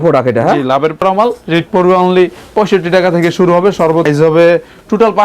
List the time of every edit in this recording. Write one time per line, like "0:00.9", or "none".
0:01.0
0:04.1